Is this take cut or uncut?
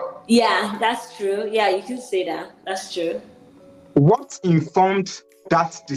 uncut